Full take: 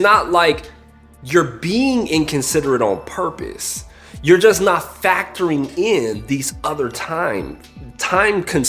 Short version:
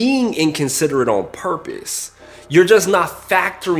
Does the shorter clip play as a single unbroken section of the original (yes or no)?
yes